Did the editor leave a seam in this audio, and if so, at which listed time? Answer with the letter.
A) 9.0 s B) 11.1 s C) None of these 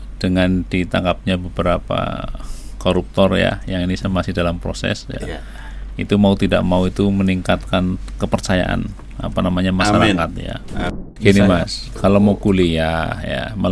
B